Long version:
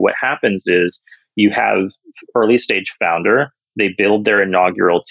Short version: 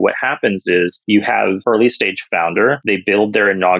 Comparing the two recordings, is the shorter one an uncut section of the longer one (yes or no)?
no